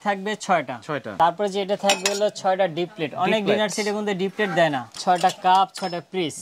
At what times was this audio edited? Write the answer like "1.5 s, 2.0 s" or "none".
1.1 s, 4.9 s